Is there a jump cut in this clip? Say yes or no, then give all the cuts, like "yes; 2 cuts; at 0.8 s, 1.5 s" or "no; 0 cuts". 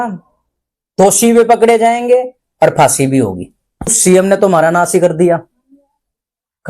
yes; 1 cut; at 4.0 s